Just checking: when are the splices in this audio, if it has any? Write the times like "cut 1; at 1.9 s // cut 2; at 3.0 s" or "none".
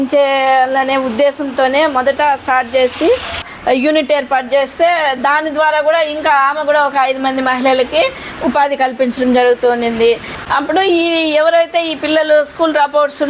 cut 1; at 3.4 s // cut 2; at 10.4 s